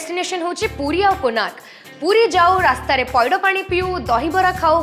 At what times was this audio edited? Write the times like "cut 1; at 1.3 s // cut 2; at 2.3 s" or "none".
none